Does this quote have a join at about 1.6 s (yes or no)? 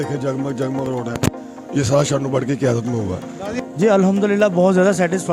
no